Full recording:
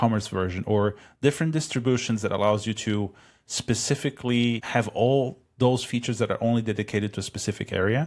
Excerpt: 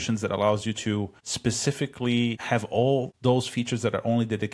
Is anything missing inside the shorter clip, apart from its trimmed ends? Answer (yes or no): yes